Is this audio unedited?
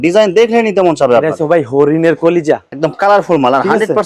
yes; 0 cuts

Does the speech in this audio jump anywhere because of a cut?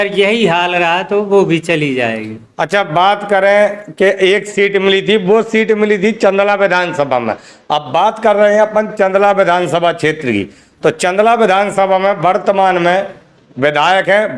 no; 0 cuts

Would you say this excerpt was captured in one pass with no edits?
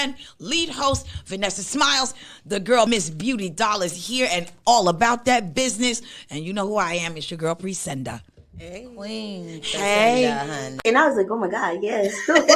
no; 1 cut; at 10.8 s

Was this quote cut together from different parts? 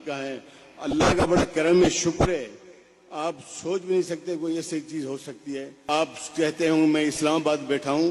yes; 1 cut; at 5.7 s

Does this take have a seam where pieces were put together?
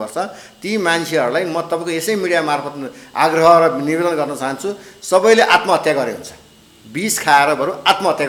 no; 0 cuts

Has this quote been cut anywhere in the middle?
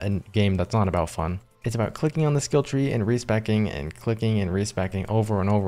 no; 0 cuts

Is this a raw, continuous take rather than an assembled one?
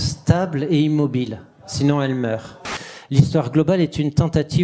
no; 1 cut; at 2.7 s

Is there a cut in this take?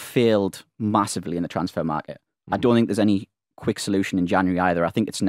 no; 0 cuts

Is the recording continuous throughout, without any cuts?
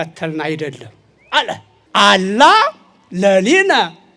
no; 1 cut; at 1.7 s

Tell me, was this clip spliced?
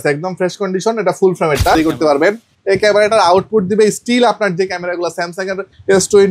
yes; 1 cut; at 1.8 s

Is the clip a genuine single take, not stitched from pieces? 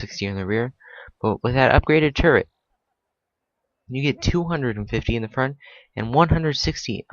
yes; 0 cuts

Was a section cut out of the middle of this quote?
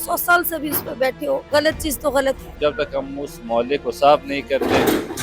yes; 2 cuts; at 1.4 s, 2.6 s

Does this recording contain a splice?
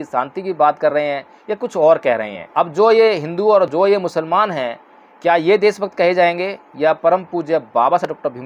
yes; 1 cut; at 2.4 s

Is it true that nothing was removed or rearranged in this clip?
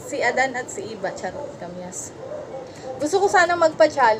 no; 1 cut; at 1.6 s

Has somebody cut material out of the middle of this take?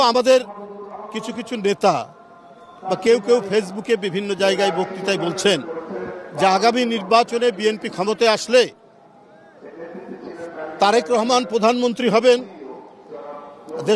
no; 0 cuts

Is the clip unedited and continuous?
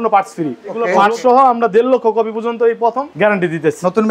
no; 2 cuts; at 0.9 s, 3.1 s

